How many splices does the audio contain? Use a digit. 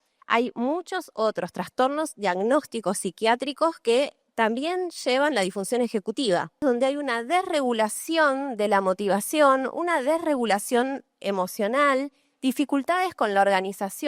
1